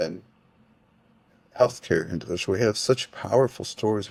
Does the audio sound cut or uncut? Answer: uncut